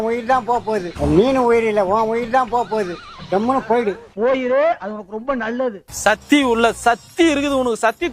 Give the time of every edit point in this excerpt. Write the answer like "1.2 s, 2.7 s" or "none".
0.9 s, 2.9 s, 5.9 s